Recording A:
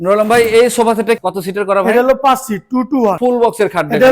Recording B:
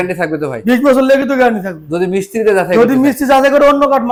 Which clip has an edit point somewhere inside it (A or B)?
A